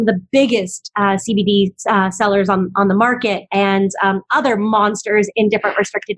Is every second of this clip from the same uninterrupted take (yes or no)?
yes